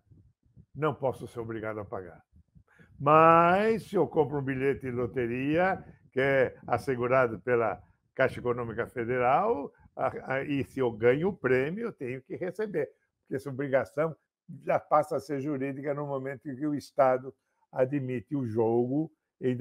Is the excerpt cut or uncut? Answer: uncut